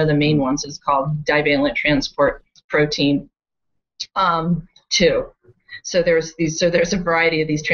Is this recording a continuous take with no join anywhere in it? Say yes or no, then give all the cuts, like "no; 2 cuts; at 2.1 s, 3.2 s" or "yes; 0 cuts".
yes; 0 cuts